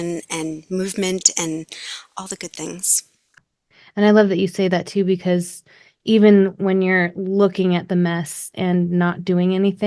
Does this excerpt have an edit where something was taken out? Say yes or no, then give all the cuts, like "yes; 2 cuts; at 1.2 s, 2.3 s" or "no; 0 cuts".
yes; 2 cuts; at 3.4 s, 5.6 s